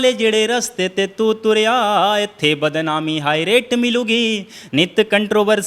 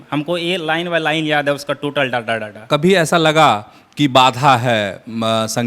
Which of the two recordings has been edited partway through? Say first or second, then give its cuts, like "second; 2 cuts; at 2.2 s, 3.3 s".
second; 1 cut; at 2.7 s